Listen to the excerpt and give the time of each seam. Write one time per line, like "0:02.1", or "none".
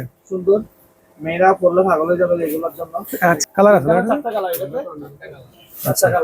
0:03.4